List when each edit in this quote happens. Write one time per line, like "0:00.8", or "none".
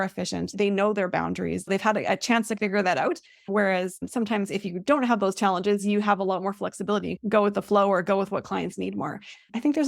0:04.0